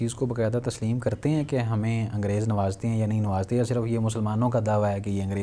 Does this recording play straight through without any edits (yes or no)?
yes